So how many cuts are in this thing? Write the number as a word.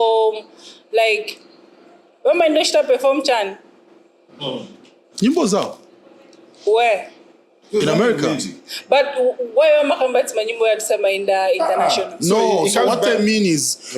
zero